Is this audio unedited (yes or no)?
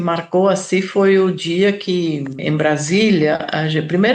no